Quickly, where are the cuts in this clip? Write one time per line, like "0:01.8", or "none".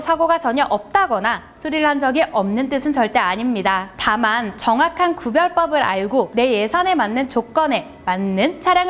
none